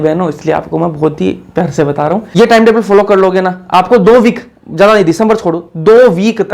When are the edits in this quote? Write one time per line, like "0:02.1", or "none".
0:02.3